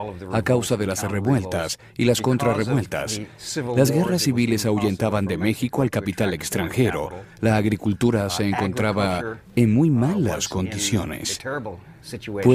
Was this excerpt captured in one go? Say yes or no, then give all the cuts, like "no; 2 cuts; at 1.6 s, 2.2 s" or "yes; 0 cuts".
no; 1 cut; at 5.1 s